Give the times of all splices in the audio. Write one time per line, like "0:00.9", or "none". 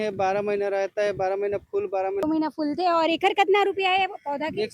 0:02.2